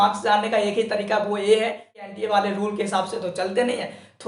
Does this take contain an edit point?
yes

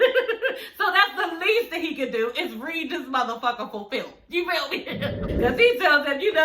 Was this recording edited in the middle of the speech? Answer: yes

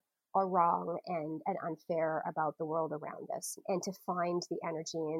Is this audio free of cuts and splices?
no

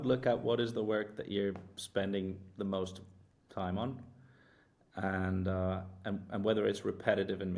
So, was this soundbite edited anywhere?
no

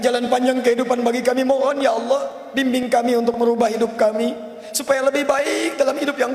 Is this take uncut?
yes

